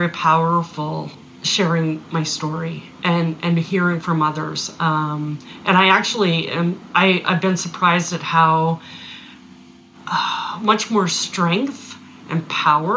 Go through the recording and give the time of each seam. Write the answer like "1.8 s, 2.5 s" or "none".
1.2 s